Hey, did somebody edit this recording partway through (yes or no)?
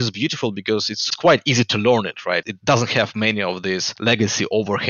yes